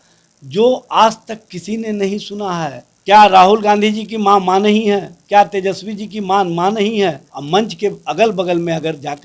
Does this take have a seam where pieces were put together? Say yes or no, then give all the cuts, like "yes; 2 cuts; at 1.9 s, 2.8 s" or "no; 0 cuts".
yes; 2 cuts; at 2.9 s, 7.3 s